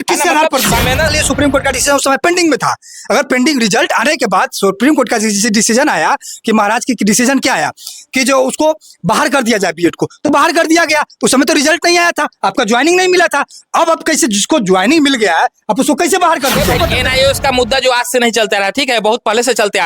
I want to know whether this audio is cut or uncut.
cut